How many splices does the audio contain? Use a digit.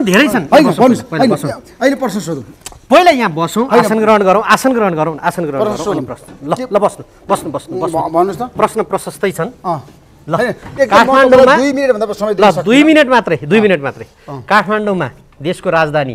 0